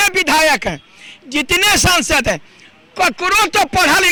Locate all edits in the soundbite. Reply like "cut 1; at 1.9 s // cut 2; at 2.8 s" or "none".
none